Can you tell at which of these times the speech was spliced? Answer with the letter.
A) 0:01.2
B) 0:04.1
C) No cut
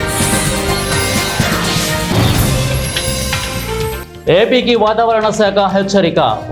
B